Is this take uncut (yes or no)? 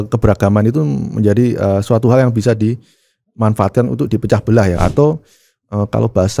no